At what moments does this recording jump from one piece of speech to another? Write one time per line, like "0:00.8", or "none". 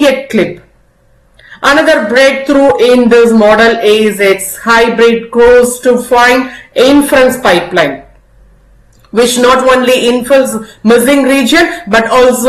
none